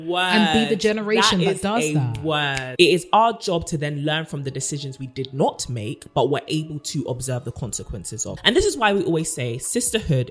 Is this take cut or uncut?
cut